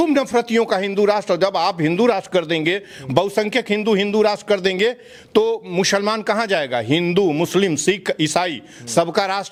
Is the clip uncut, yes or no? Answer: yes